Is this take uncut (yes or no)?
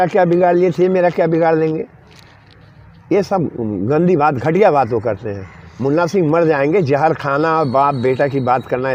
yes